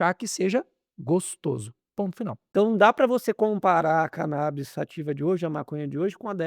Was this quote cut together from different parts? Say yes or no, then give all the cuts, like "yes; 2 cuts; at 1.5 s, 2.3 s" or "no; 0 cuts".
yes; 1 cut; at 2.6 s